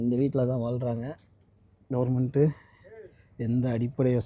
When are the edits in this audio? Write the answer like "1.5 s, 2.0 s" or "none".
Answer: none